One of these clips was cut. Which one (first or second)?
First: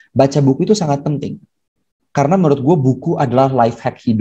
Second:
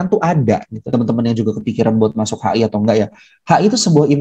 second